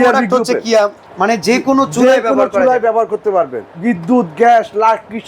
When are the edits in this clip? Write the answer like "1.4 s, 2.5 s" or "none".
1.1 s, 3.6 s